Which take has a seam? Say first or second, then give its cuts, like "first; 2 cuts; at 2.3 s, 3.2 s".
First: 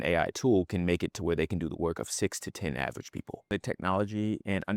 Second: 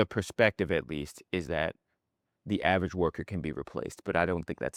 first; 1 cut; at 3.5 s